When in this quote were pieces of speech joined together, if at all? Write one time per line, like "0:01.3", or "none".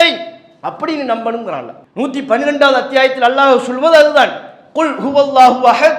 0:01.8